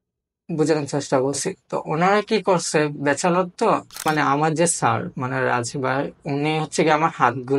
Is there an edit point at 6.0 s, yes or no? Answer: no